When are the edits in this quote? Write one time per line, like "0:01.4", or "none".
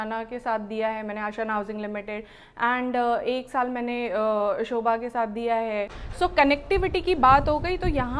0:06.0